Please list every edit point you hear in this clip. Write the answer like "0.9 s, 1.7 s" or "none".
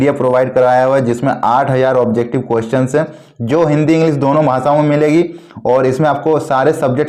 none